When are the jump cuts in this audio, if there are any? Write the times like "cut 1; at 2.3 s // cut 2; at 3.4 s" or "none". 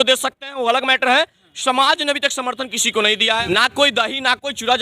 cut 1; at 3.4 s